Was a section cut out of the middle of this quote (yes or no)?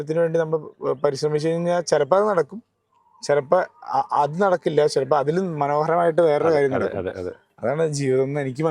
no